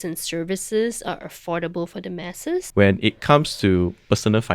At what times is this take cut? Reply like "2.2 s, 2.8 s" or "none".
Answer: 2.7 s